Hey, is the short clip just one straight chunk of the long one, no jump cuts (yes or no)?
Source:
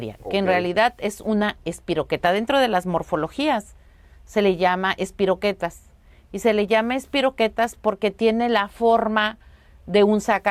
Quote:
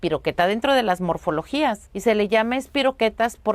no